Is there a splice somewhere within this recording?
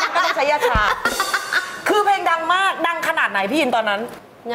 no; 0 cuts

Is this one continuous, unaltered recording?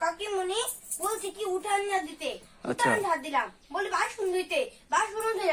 yes; 0 cuts

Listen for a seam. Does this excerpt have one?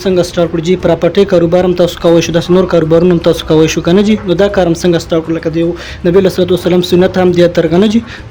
no; 0 cuts

